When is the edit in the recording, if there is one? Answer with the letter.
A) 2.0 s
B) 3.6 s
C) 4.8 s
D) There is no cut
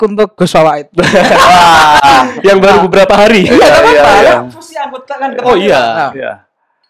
D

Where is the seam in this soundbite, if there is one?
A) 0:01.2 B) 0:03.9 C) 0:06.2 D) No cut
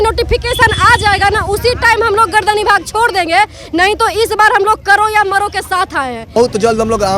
C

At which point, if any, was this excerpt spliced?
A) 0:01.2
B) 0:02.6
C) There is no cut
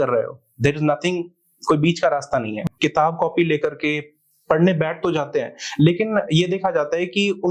B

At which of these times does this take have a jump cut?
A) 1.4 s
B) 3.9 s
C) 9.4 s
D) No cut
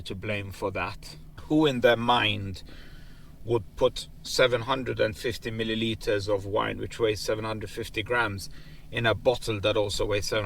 A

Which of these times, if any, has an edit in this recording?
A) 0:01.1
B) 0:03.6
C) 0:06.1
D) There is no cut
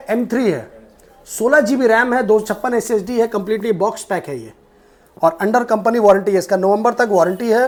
D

